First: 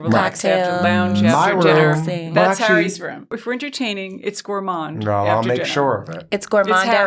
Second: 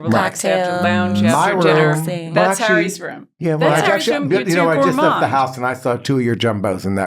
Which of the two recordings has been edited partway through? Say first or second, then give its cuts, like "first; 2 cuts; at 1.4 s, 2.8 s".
first; 1 cut; at 3.3 s